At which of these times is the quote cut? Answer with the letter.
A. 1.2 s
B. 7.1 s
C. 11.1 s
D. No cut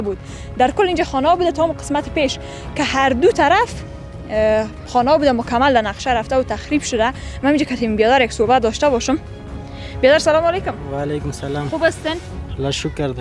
D